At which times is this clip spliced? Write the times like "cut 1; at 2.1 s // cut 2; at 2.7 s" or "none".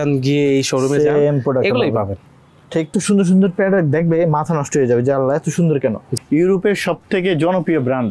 cut 1; at 2.9 s // cut 2; at 6.1 s

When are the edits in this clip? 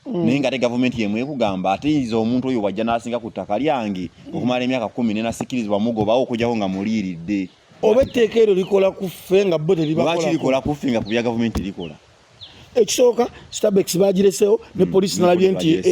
cut 1; at 7.6 s

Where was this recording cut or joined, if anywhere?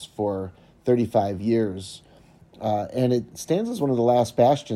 none

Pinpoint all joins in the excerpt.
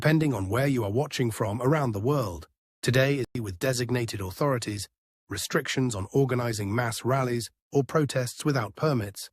cut 1; at 3.3 s

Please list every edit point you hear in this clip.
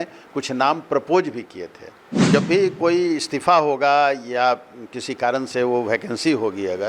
cut 1; at 2.3 s

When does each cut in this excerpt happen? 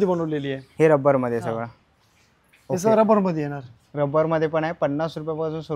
none

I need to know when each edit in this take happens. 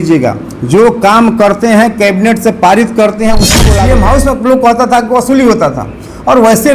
cut 1; at 3.7 s

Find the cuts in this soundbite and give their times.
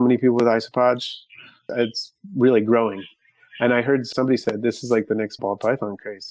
cut 1; at 1.7 s // cut 2; at 4.1 s // cut 3; at 5.4 s

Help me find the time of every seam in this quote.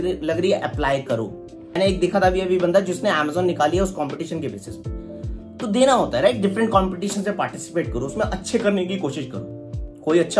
cut 1; at 1.6 s

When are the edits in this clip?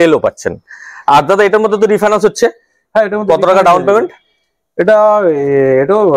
none

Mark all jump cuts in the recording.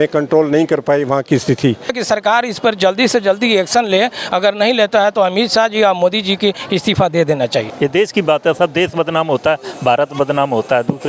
cut 1; at 2.0 s // cut 2; at 7.7 s

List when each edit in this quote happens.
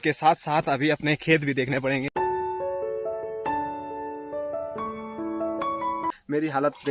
cut 1; at 2.1 s // cut 2; at 6.1 s

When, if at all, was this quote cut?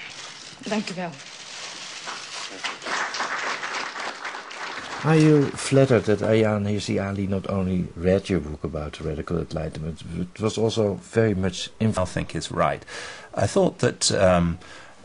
none

